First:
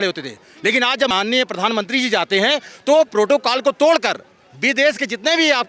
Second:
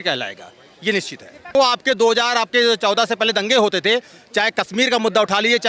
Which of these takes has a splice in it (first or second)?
second